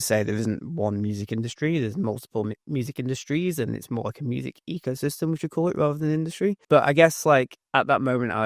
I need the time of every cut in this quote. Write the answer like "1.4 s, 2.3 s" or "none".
6.6 s